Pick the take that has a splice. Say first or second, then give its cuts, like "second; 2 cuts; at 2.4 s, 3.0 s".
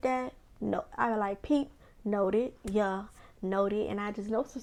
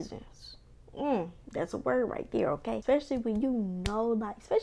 second; 1 cut; at 2.8 s